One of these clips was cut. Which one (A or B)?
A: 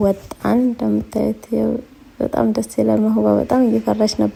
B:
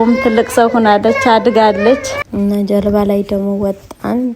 B